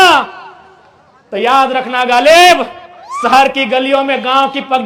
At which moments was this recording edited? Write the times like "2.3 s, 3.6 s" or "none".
none